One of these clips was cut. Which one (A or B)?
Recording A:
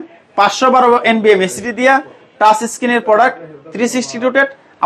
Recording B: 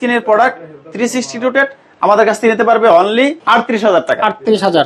B